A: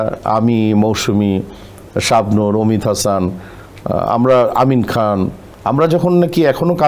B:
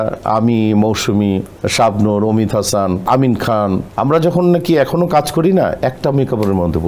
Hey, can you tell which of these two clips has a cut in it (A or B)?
B